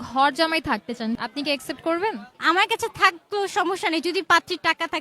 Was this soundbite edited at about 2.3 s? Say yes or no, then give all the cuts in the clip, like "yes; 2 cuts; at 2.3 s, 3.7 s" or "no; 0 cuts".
yes; 2 cuts; at 1.2 s, 2.3 s